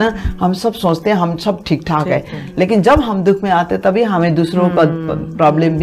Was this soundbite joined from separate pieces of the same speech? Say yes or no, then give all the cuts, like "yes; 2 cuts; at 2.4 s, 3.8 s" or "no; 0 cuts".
no; 0 cuts